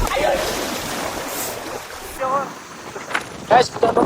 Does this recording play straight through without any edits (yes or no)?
no